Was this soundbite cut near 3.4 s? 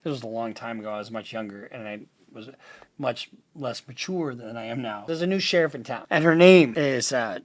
no; 3 cuts; at 5.0 s, 5.9 s, 6.7 s

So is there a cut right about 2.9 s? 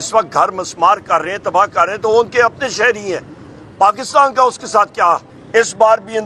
no; 1 cut; at 5.3 s

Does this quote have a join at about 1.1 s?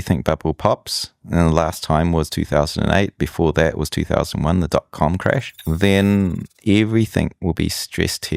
no; 1 cut; at 5.5 s

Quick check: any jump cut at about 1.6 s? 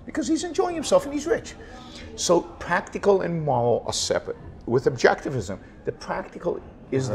no; 0 cuts

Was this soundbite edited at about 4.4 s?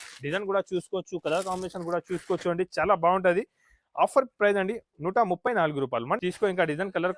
no; 1 cut; at 6.2 s

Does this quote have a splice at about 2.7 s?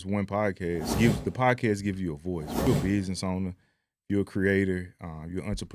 yes; 2 cuts; at 1.0 s, 2.7 s

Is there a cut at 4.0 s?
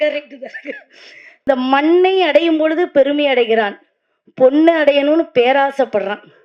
no; 1 cut; at 1.5 s

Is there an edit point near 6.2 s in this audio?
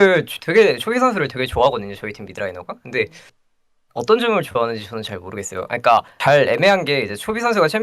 yes; 1 cut; at 6.2 s

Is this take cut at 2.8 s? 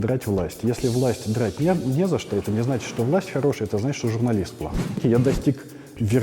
no; 1 cut; at 5.0 s

